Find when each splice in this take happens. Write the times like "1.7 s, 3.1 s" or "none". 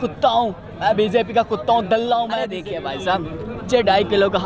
2.6 s